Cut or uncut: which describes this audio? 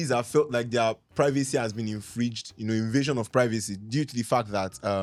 uncut